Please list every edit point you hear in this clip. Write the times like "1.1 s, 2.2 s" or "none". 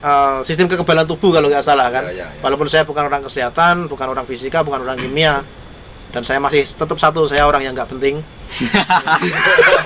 none